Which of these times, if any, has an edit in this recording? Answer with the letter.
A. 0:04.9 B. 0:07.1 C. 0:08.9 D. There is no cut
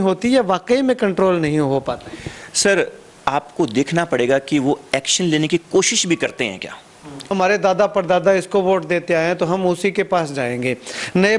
B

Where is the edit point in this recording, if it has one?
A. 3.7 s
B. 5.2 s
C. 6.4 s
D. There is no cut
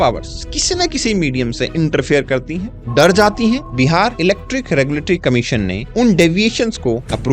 A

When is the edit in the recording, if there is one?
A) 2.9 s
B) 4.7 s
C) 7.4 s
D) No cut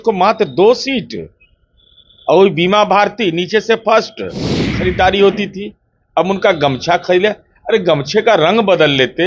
B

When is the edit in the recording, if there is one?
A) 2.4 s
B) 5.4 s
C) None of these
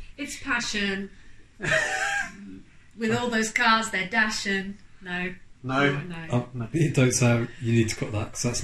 C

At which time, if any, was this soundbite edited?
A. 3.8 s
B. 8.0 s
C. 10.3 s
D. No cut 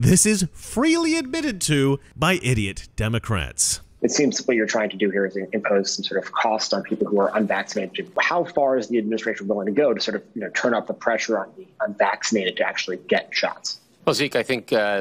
B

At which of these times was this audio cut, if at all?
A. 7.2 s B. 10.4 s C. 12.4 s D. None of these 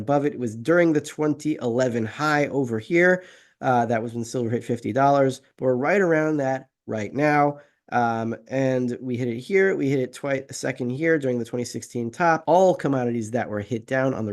C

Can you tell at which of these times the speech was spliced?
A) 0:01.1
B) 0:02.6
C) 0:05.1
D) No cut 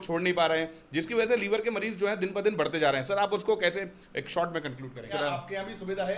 C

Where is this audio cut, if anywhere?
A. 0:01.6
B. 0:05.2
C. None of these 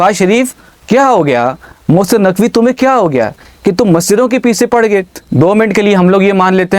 B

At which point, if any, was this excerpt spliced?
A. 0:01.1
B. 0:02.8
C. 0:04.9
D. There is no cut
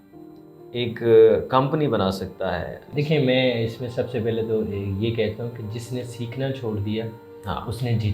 B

